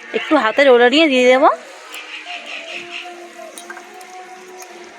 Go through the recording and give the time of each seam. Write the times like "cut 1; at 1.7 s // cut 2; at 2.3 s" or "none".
none